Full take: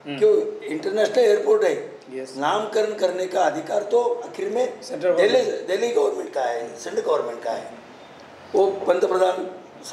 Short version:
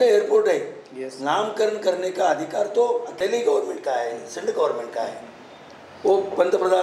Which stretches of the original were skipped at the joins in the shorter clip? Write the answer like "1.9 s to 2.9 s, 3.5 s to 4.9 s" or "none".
4.3 s to 5.6 s